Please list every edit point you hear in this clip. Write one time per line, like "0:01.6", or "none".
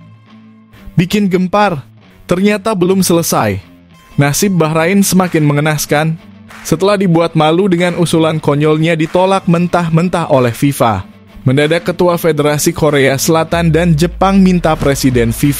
0:00.9